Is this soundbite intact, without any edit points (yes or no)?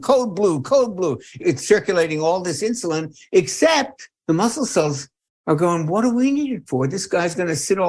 no